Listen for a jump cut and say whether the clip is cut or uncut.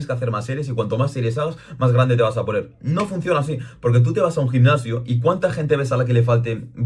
uncut